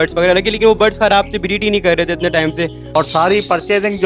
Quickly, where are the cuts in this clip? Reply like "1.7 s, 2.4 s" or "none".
2.8 s